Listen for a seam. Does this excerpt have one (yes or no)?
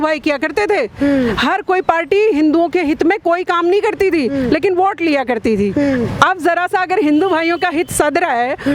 no